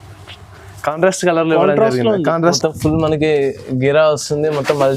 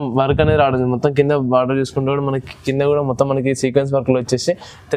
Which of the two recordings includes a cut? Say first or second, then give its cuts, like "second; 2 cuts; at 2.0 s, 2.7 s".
first; 1 cut; at 2.4 s